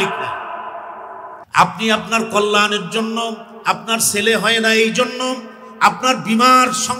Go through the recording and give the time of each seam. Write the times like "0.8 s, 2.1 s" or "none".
1.3 s